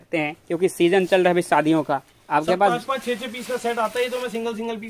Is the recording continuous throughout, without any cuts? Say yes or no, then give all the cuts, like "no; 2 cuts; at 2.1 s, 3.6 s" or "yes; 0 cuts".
yes; 0 cuts